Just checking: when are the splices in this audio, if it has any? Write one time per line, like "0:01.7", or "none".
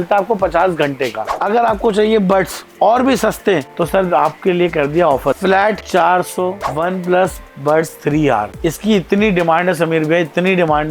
0:01.3
0:05.4
0:06.7